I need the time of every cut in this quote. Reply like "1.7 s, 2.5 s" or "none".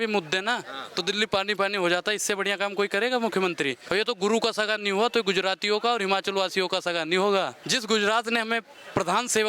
3.8 s, 7.6 s